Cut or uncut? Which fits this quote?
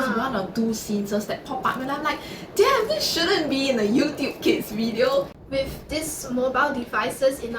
cut